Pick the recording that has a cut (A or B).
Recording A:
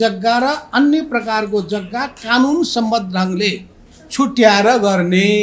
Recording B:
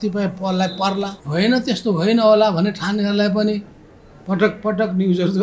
B